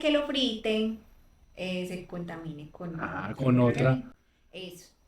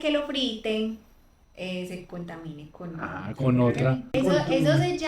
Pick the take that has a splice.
second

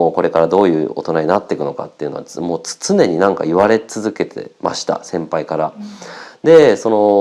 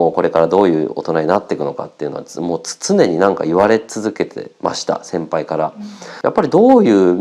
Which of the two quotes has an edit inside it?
second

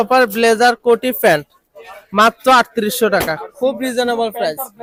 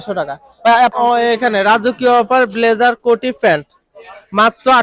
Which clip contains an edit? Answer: second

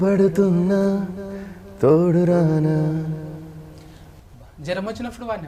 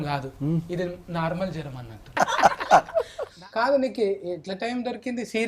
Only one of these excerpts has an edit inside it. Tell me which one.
second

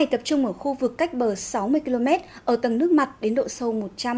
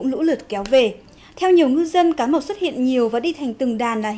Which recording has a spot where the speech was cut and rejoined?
first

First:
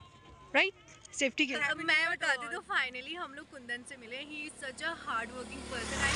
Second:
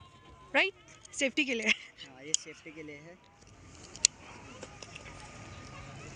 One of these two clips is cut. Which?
first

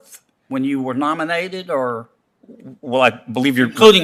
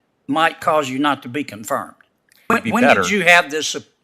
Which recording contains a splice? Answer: second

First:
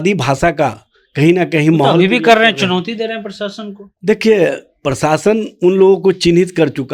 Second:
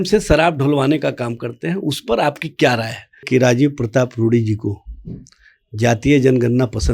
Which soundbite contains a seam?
second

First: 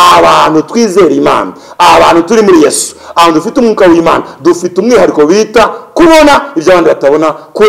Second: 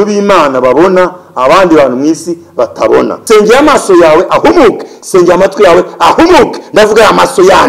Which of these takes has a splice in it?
second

